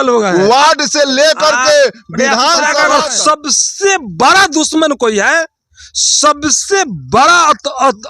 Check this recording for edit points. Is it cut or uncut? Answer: cut